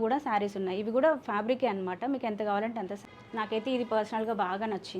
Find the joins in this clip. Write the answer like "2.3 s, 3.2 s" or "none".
3.0 s